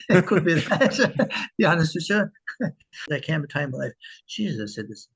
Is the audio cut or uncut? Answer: cut